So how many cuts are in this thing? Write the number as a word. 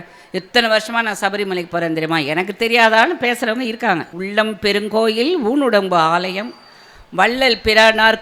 one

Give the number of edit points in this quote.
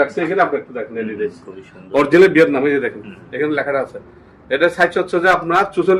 zero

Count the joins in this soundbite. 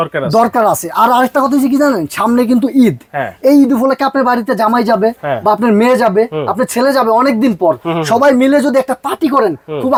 zero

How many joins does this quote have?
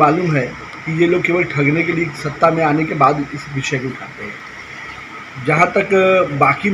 zero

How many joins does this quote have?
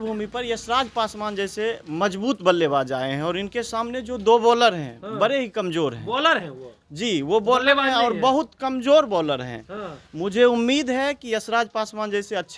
zero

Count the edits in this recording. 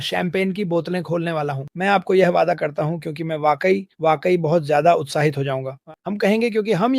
one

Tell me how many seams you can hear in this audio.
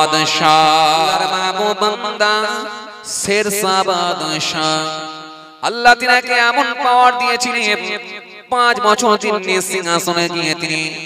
one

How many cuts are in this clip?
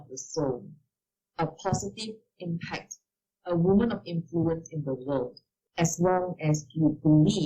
two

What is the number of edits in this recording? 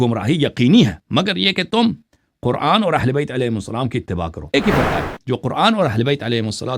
one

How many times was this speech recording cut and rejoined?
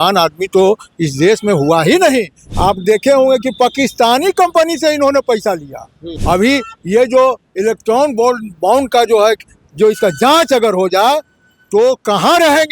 two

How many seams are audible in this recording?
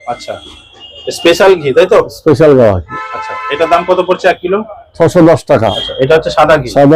one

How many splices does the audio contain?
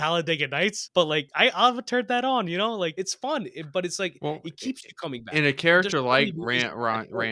two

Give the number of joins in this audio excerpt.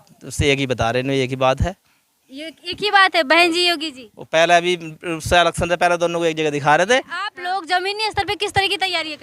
one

